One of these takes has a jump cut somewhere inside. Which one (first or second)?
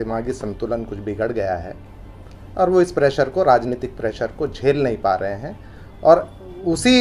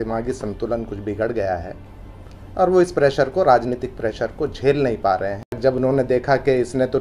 second